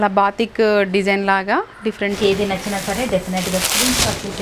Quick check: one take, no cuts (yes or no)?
no